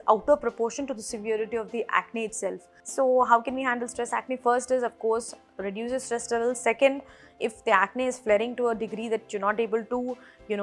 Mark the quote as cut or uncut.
cut